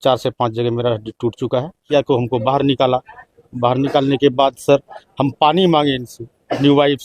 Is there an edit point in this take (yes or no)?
yes